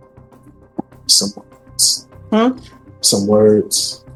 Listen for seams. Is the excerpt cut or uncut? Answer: uncut